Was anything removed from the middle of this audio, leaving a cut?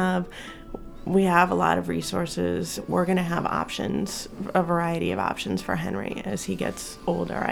yes; 1 cut; at 2.8 s

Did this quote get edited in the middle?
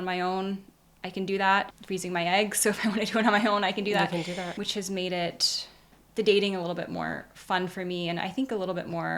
no; 0 cuts

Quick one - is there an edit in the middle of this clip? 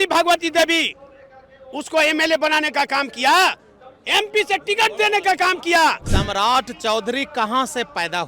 yes; 1 cut; at 6.1 s

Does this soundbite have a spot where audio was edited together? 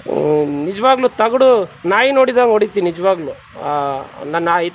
no; 0 cuts

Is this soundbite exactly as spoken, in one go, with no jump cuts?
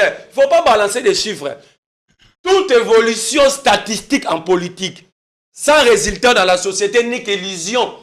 yes; 0 cuts

